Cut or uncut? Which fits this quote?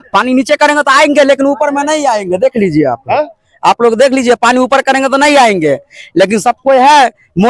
uncut